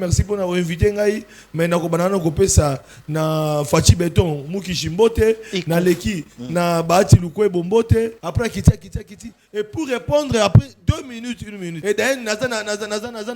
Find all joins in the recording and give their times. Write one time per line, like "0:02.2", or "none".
0:08.2
0:11.7